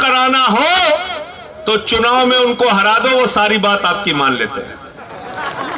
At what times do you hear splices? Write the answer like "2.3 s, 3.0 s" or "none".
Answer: none